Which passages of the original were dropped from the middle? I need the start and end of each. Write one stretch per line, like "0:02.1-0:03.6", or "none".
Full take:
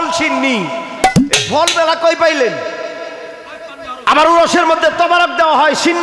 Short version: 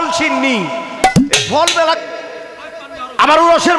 0:02.0-0:02.9